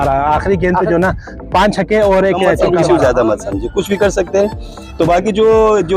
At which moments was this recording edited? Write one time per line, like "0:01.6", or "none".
0:02.5

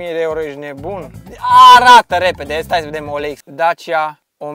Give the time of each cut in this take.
none

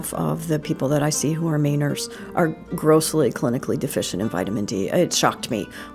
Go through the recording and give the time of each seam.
none

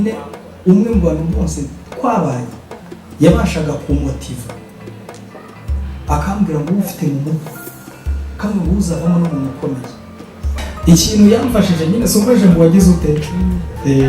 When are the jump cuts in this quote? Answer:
0:10.6

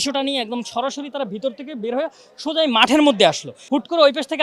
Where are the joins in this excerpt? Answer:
0:03.5

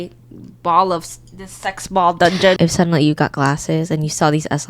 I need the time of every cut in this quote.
0:02.6

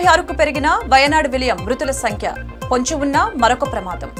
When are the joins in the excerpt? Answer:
none

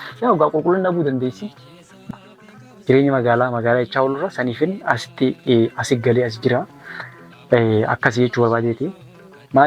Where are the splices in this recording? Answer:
0:02.1

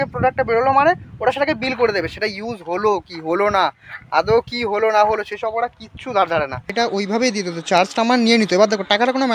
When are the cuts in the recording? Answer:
0:06.7

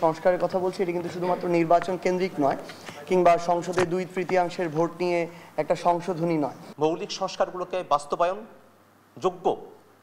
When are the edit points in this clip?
0:06.6

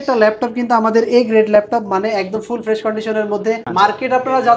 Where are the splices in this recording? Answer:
0:03.6

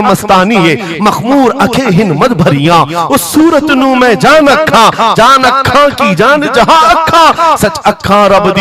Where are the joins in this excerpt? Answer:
none

